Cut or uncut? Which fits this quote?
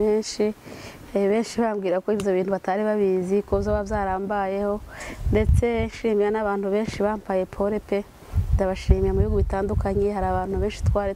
uncut